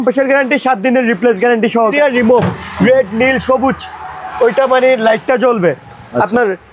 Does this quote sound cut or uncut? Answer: cut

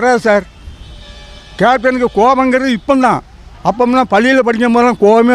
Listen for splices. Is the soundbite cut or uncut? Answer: uncut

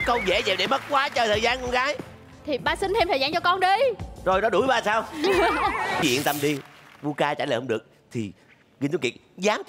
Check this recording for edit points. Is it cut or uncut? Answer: cut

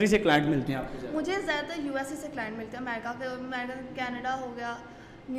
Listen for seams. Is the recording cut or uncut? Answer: uncut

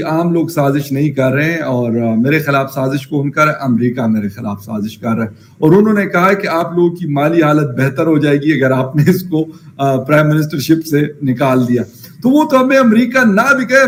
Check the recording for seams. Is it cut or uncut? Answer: uncut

